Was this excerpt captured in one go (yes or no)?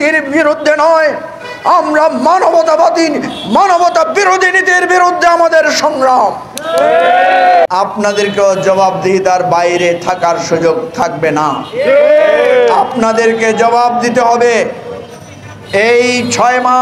no